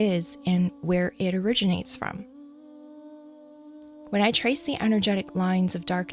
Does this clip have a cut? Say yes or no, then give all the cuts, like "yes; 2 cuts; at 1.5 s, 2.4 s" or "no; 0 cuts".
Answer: no; 0 cuts